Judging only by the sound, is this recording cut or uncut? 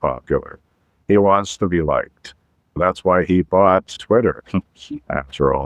cut